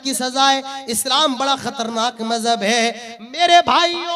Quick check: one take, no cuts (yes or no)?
yes